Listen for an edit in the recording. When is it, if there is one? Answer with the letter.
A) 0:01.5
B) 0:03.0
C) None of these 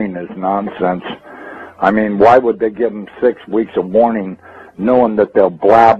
B